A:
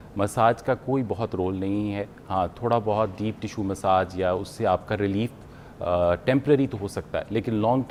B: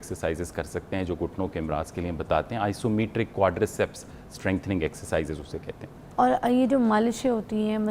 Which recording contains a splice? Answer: B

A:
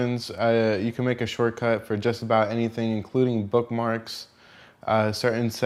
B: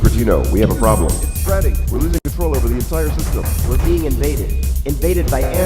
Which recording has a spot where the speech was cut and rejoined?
B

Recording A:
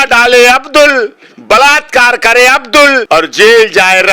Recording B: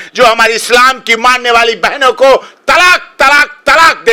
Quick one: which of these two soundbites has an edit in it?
A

